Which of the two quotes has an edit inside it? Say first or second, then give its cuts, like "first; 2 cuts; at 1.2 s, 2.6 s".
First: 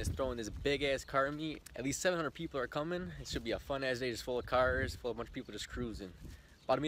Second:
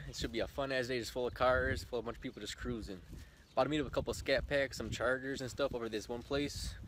first; 1 cut; at 1.6 s